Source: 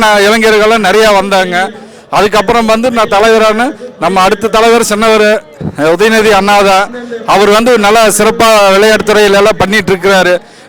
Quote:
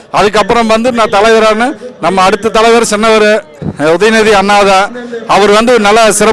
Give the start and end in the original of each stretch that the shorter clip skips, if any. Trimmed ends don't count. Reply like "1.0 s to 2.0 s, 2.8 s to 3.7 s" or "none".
none